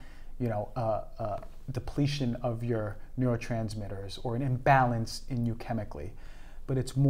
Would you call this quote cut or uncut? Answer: uncut